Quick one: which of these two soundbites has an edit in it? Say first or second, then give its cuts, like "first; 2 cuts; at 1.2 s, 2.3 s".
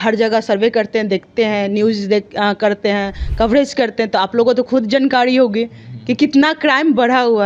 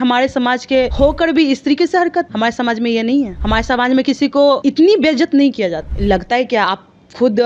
second; 5 cuts; at 0.9 s, 2.3 s, 3.4 s, 4.6 s, 5.9 s